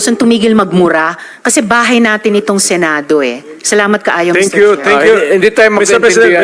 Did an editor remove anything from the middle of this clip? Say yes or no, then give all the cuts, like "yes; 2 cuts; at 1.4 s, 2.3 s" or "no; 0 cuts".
no; 0 cuts